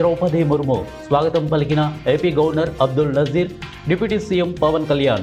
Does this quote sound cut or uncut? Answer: uncut